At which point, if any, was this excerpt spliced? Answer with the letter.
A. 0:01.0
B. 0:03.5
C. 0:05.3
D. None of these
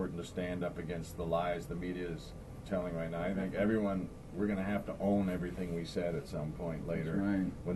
B